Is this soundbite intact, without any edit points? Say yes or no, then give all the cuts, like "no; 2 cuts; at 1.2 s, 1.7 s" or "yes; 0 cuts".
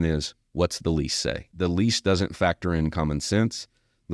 no; 1 cut; at 1.5 s